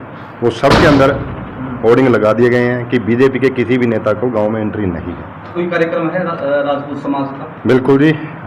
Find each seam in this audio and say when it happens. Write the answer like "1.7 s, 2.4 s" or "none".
5.5 s

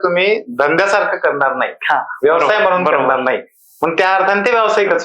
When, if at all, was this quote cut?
none

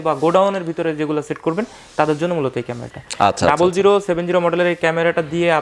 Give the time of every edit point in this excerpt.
none

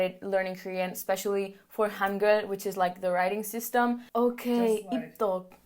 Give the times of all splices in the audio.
4.1 s

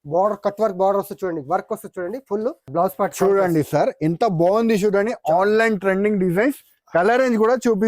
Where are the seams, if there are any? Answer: 2.7 s

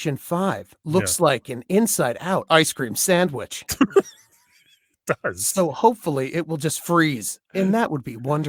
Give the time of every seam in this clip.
none

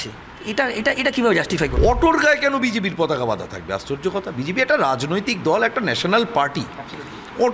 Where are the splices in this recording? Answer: 1.7 s

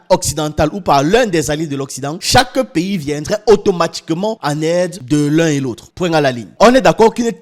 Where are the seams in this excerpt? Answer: none

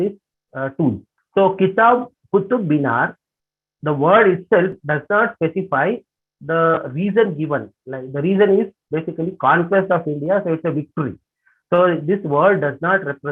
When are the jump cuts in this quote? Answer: 1.1 s

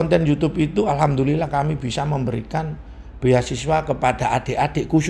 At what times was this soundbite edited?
none

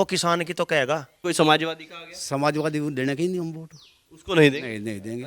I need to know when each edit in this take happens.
1.1 s

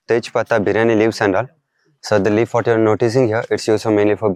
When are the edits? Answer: none

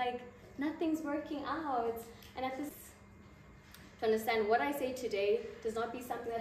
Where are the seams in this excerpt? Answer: 2.7 s

